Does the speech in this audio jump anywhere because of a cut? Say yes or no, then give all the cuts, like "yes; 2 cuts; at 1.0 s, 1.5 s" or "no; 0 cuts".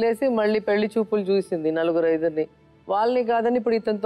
no; 0 cuts